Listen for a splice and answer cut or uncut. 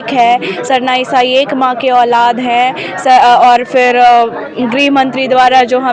uncut